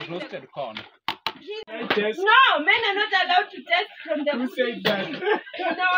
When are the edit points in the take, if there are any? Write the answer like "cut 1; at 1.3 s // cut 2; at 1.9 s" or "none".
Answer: cut 1; at 1.6 s